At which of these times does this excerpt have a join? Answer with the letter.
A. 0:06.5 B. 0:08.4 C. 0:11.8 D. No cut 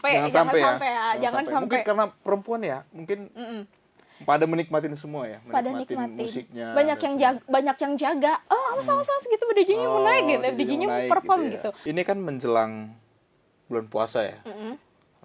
C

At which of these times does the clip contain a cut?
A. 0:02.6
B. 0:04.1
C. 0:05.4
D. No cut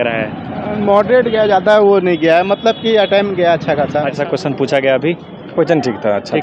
B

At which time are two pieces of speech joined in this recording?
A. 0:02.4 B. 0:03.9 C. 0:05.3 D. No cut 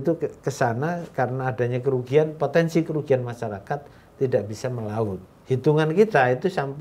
C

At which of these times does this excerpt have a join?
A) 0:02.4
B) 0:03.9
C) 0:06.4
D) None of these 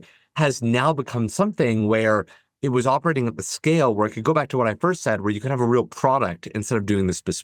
D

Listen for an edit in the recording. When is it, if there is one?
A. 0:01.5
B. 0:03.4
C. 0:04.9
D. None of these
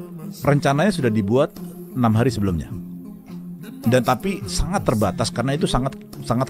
D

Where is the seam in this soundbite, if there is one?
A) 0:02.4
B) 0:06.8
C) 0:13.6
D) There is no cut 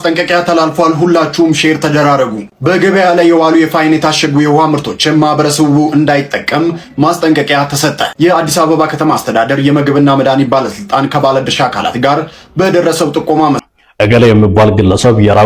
C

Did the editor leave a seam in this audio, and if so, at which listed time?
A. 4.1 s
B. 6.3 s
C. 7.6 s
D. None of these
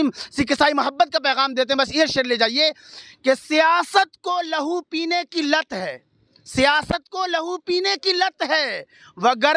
D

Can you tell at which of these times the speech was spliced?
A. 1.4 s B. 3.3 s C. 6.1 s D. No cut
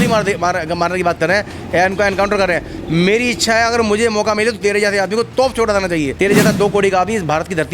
C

